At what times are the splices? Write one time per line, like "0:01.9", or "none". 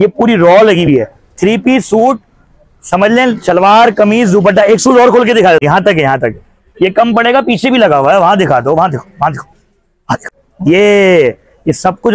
0:05.6
0:10.4